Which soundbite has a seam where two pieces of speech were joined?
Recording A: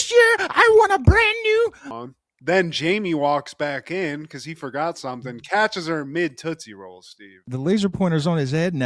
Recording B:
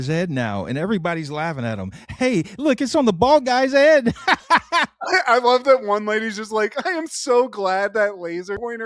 A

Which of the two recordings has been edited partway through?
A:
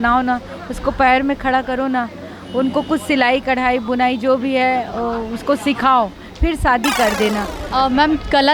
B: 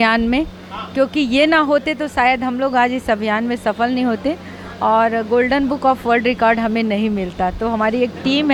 A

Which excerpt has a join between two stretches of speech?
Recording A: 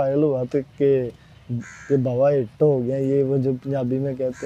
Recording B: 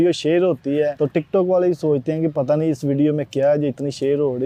B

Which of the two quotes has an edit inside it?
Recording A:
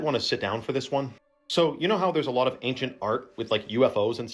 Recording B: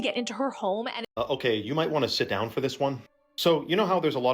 B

